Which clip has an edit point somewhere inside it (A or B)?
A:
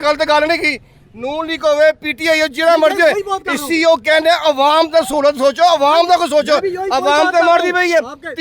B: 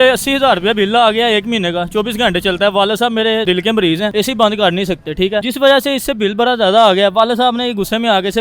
B